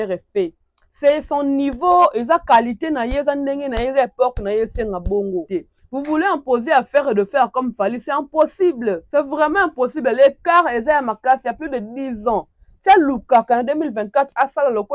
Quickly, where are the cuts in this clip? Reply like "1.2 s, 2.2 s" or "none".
5.5 s, 9.0 s

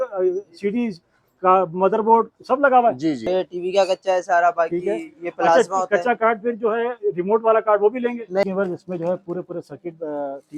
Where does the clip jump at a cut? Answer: 3.2 s, 8.4 s

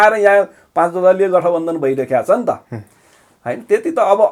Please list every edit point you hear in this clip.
none

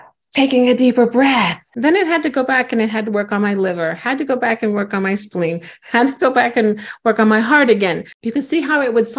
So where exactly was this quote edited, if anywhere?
1.7 s

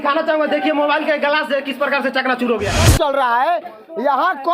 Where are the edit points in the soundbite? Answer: 2.8 s

